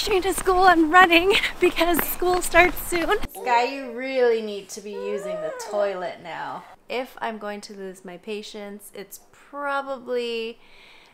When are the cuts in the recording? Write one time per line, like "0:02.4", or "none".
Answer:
0:03.3
0:06.7

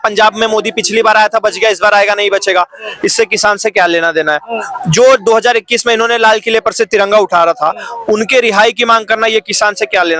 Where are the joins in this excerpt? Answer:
none

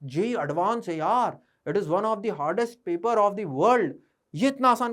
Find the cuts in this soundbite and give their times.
none

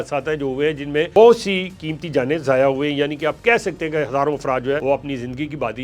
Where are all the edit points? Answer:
0:04.8

